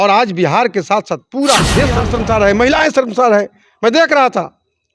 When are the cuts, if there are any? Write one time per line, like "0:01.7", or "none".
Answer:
0:02.0